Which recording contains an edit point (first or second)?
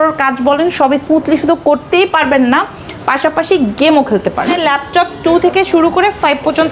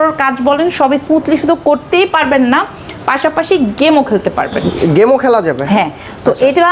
first